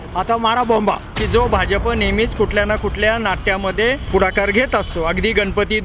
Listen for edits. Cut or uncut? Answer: cut